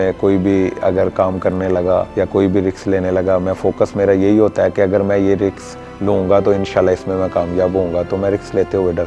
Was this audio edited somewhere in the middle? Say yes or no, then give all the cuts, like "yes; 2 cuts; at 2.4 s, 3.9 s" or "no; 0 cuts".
no; 0 cuts